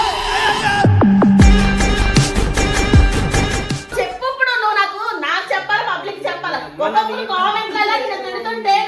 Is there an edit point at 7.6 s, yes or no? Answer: no